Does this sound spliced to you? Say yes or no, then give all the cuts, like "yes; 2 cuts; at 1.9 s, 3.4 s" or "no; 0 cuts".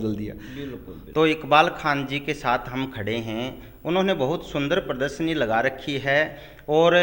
no; 0 cuts